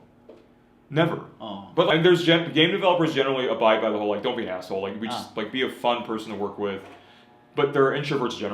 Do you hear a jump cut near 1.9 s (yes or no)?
yes